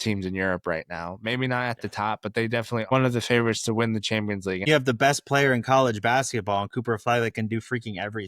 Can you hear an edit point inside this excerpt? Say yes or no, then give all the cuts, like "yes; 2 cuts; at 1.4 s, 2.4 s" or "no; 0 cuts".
yes; 2 cuts; at 2.9 s, 4.7 s